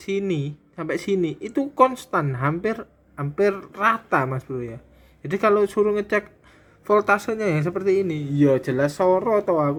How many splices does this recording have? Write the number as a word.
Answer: zero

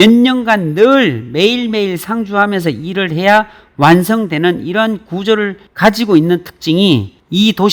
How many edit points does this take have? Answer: zero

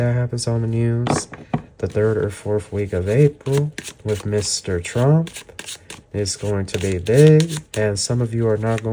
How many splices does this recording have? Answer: zero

